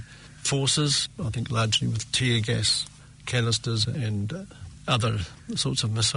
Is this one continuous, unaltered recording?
no; 1 cut; at 4.0 s

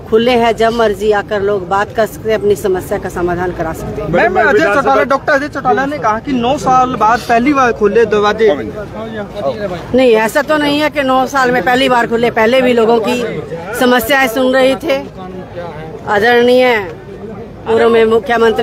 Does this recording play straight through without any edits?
yes; 0 cuts

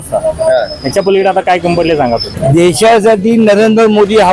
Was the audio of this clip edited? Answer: yes; 1 cut; at 2.3 s

